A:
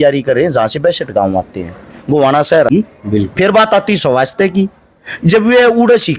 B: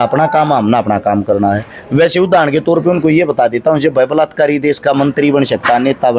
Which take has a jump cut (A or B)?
A